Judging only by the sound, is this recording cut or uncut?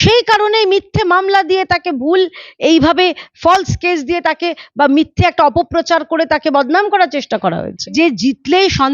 cut